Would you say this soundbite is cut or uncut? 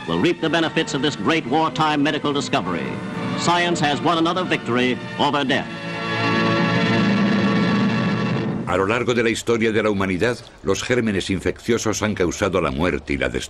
uncut